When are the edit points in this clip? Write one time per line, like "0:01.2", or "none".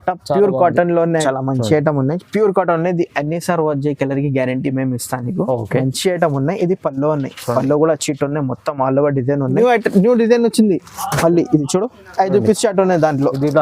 0:01.2
0:09.6